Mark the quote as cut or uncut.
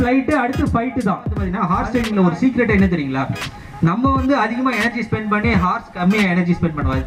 cut